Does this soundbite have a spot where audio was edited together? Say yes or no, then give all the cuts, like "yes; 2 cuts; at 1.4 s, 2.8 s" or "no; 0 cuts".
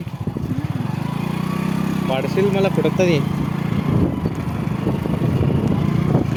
no; 0 cuts